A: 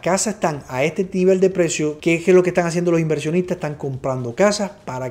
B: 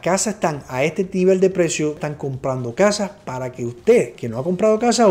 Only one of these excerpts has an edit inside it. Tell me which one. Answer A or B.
B